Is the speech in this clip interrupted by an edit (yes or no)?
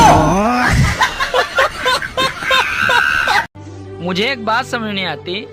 yes